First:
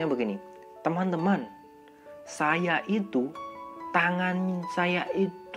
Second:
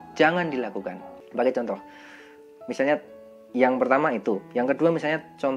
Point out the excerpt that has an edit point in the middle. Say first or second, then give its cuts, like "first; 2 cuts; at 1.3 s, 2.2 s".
second; 1 cut; at 1.1 s